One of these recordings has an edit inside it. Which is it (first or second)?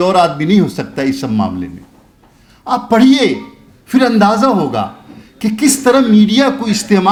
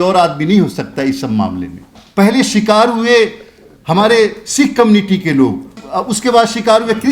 second